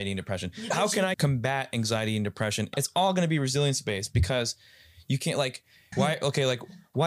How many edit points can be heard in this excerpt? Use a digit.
3